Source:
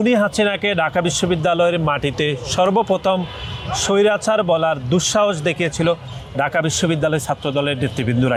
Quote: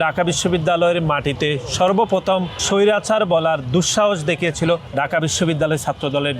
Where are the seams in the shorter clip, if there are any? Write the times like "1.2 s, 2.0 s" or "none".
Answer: 2.6 s, 4.9 s